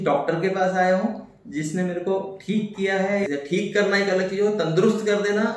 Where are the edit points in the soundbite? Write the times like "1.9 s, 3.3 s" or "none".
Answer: 3.3 s